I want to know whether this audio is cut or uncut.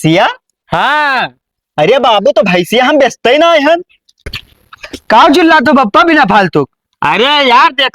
cut